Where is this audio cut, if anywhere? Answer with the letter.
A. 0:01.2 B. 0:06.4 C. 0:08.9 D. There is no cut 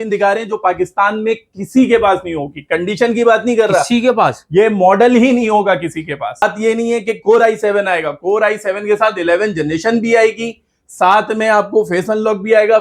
B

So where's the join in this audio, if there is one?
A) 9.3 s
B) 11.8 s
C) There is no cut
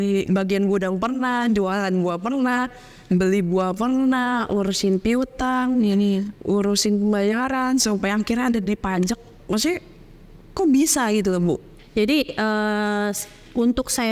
B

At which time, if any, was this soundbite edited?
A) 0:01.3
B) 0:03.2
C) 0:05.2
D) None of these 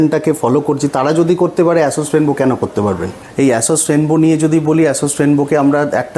B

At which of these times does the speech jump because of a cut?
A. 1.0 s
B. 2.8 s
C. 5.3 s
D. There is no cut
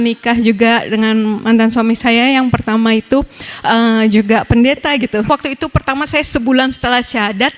C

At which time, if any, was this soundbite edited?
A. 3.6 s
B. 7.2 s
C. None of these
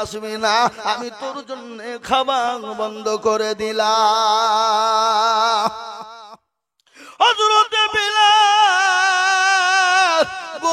C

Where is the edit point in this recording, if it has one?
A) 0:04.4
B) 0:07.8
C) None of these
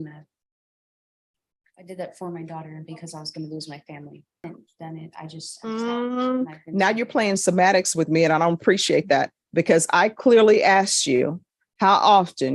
A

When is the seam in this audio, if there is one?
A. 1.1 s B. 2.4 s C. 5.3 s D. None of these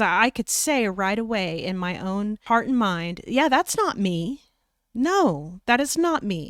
B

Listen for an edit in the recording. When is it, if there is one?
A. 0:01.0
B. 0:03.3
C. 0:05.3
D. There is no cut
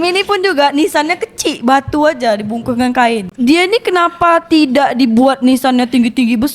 B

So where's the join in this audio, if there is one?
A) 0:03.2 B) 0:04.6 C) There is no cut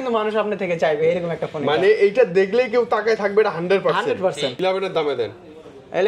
B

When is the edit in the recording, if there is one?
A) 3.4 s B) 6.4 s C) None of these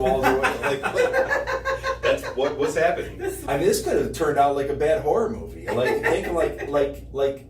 A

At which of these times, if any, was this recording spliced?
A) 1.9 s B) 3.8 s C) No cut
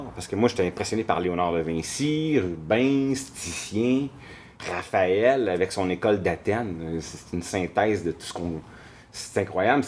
B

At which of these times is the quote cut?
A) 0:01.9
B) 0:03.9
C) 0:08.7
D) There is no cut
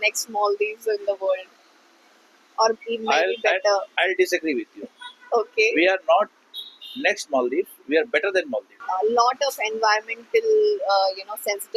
C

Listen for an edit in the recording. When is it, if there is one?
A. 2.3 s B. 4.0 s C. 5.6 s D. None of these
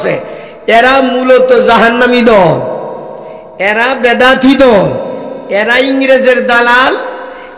D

